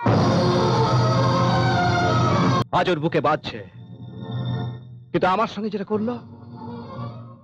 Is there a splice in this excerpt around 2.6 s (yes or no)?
yes